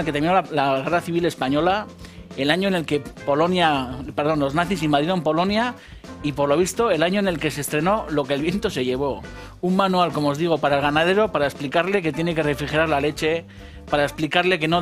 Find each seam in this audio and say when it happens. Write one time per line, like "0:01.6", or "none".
0:05.4